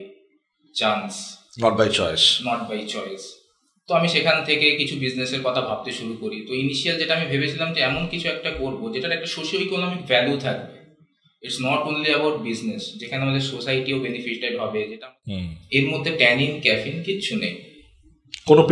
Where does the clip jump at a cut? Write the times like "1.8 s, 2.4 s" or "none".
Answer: 14.9 s